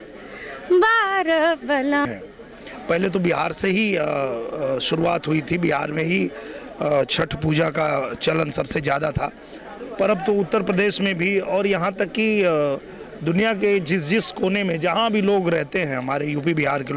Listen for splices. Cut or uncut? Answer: cut